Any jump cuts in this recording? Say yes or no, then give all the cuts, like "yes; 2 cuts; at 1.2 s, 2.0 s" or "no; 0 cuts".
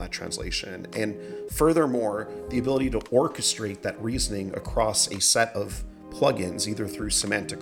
no; 0 cuts